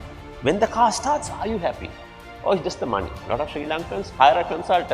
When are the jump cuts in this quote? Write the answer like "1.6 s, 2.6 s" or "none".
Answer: 3.2 s

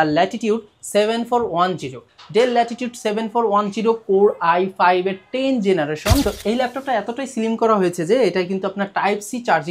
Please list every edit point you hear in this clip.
6.2 s

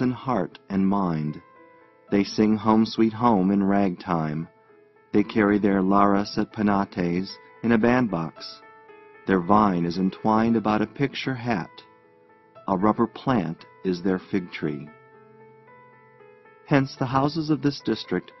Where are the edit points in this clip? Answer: 16.5 s

